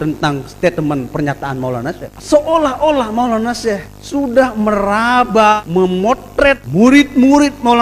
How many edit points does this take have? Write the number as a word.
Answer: four